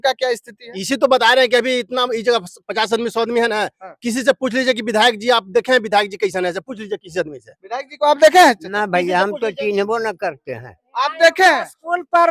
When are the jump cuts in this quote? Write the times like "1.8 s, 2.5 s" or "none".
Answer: none